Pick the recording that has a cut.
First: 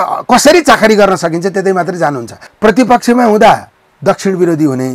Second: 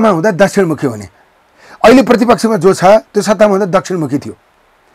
first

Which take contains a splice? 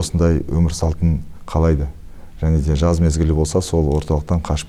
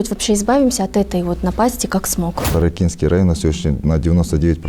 second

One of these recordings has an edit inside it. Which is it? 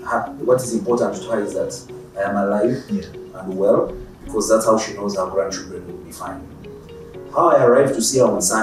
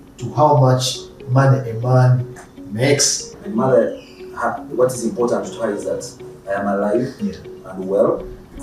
second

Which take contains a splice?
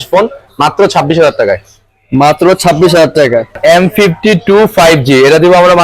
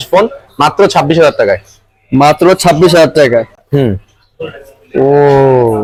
first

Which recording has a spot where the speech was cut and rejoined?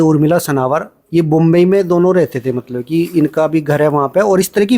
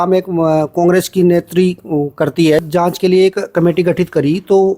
second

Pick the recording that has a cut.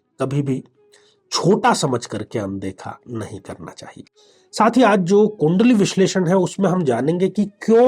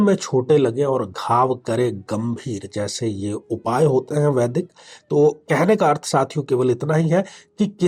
first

